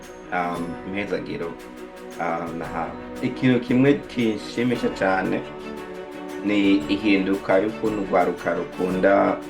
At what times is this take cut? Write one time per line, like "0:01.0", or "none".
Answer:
0:03.2